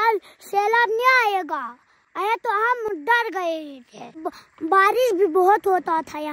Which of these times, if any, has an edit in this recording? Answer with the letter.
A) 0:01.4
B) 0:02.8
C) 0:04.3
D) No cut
C